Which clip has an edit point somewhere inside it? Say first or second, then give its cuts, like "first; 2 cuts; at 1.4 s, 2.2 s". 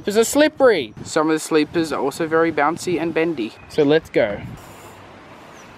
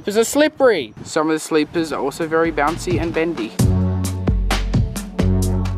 first; 2 cuts; at 3.5 s, 4.5 s